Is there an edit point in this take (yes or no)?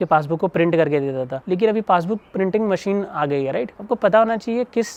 no